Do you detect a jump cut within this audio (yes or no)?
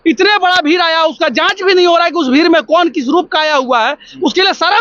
no